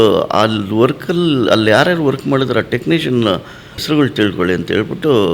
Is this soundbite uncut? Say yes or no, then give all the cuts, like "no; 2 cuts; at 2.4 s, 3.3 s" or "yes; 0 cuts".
no; 1 cut; at 3.8 s